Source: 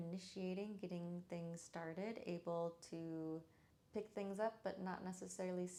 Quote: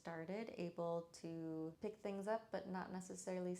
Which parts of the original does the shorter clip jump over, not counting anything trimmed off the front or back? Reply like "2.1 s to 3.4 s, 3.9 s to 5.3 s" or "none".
3.4 s to 3.9 s